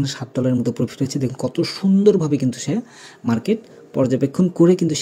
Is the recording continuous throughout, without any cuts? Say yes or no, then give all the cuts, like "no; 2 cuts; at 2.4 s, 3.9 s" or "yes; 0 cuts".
yes; 0 cuts